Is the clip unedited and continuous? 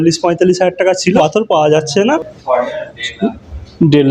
no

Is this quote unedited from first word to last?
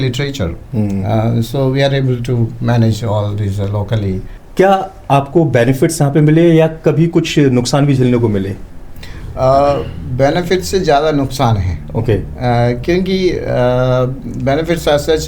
no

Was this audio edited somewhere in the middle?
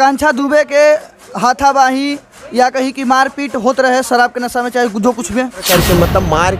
yes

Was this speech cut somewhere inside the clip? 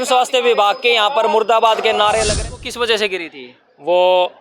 yes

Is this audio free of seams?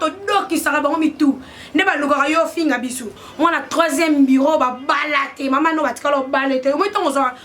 no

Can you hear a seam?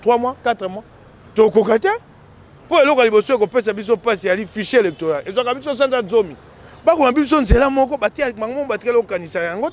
no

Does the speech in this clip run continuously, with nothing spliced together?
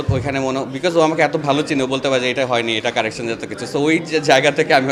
yes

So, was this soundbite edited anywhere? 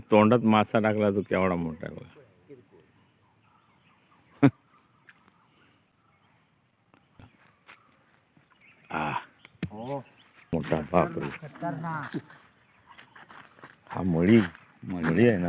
yes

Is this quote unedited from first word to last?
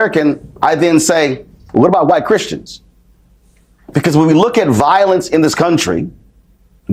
yes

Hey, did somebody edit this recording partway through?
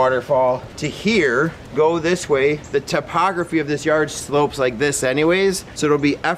yes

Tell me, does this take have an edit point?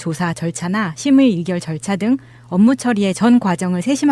no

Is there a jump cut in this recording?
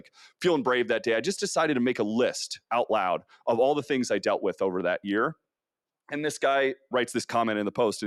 no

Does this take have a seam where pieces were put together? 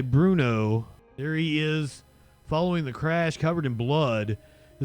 yes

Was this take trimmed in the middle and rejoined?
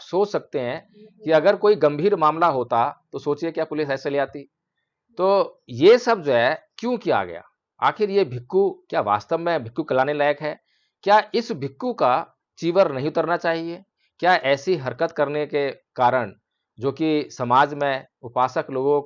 no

